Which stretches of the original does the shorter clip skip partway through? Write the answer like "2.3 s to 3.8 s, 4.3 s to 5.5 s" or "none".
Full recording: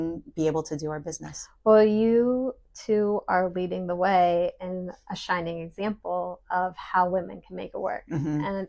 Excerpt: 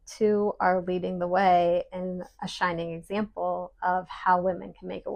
none